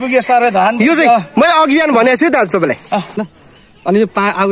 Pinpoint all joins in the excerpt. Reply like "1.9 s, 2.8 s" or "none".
3.3 s